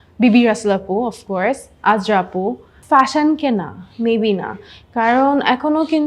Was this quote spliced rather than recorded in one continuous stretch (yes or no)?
yes